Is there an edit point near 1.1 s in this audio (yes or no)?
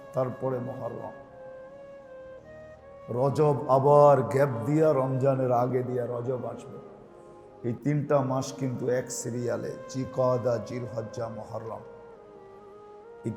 no